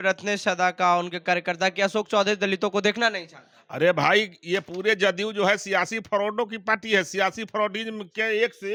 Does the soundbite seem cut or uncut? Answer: uncut